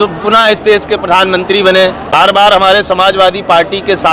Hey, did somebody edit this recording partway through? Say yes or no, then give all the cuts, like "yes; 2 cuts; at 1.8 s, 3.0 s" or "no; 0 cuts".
yes; 1 cut; at 2.0 s